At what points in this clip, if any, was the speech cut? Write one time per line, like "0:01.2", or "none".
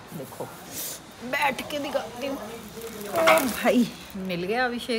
0:04.1